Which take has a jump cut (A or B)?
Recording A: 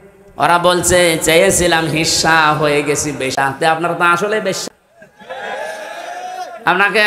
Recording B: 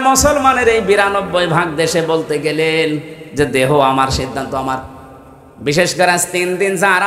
A